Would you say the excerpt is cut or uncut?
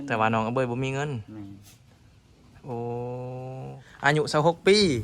cut